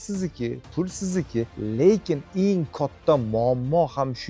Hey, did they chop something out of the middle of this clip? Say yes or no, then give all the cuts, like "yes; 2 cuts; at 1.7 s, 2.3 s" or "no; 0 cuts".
yes; 1 cut; at 1.5 s